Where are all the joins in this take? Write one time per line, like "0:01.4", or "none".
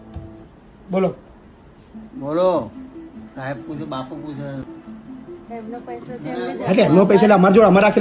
0:04.6